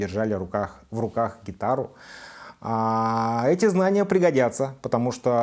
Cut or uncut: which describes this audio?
uncut